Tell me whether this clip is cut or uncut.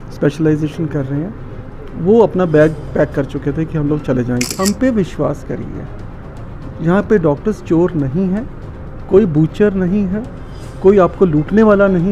cut